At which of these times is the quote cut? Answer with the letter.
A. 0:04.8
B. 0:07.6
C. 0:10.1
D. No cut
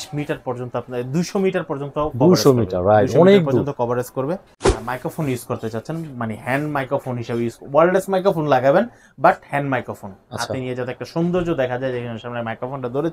A